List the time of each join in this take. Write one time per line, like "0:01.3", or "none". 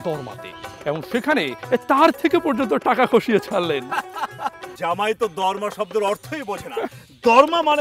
0:04.7